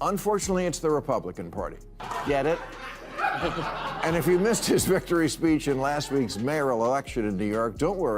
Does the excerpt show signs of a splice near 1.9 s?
yes; 1 cut; at 1.9 s

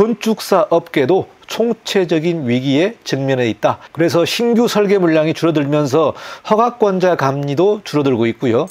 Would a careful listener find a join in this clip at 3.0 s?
no; 0 cuts

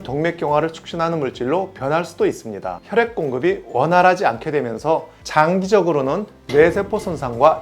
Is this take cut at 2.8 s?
yes; 1 cut; at 2.8 s

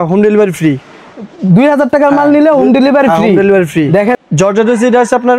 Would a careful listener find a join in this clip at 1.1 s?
no; 1 cut; at 4.1 s

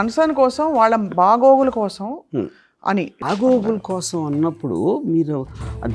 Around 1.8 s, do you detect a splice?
no; 1 cut; at 3.2 s

